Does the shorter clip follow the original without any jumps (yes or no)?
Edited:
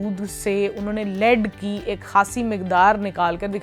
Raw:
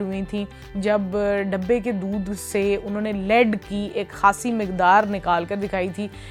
yes